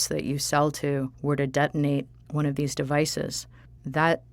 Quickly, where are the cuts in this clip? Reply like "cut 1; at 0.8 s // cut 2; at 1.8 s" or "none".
cut 1; at 1.1 s // cut 2; at 2.2 s // cut 3; at 3.4 s